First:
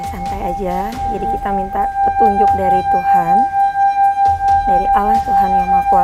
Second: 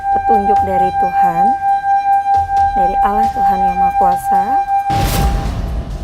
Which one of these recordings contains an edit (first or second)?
second